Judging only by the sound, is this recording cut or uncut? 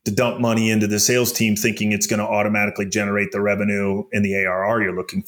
uncut